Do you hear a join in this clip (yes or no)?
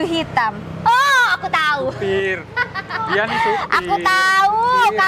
no